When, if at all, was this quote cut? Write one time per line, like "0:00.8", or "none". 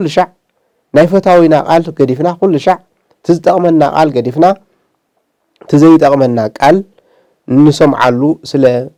none

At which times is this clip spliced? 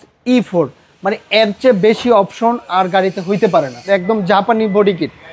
0:03.8

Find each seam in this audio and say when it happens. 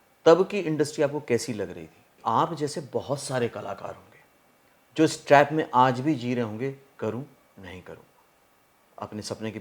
0:02.2

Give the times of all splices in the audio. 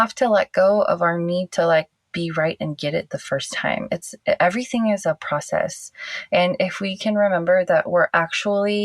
none

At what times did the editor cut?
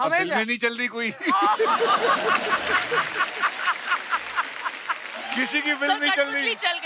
none

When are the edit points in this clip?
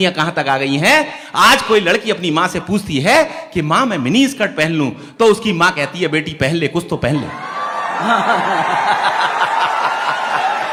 none

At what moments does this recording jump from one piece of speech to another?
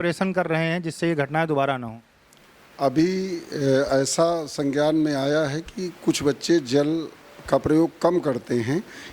none

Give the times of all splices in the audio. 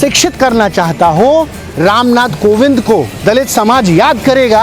0:01.6
0:03.1

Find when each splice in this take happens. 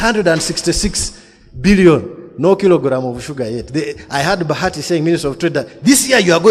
none

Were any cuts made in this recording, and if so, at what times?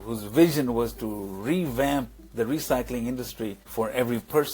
0:03.6

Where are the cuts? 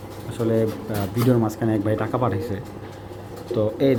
none

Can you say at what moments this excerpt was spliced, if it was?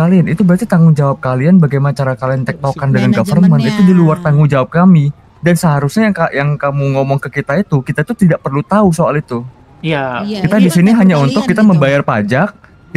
none

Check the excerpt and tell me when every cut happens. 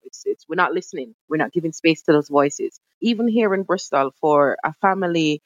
0:02.8

